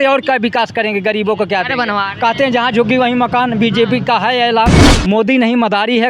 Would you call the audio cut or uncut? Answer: cut